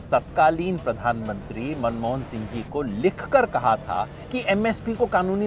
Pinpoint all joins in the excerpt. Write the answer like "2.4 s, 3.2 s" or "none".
4.2 s

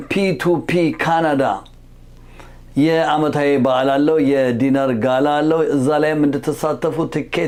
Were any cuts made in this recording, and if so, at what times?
none

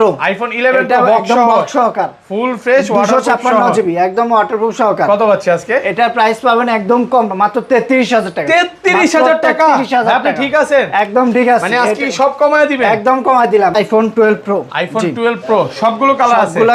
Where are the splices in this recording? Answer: 13.8 s

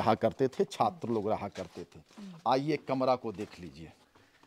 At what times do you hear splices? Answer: none

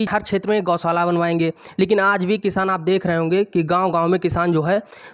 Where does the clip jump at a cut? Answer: none

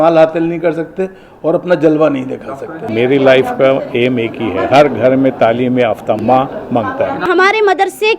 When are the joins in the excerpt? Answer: 2.9 s, 6.2 s, 7.3 s

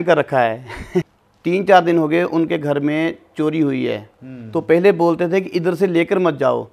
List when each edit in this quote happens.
1.1 s

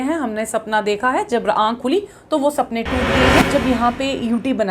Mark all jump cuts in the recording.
3.5 s

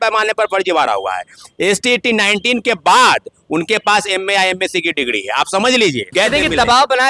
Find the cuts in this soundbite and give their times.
6.1 s

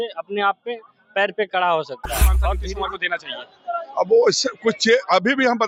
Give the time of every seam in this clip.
2.5 s

